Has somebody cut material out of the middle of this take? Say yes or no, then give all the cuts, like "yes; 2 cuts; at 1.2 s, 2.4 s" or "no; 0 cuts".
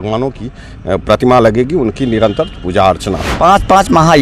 yes; 1 cut; at 3.3 s